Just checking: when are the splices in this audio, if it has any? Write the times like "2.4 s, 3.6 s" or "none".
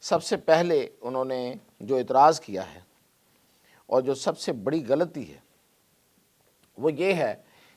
none